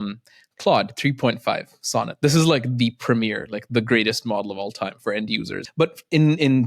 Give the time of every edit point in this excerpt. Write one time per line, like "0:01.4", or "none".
0:05.6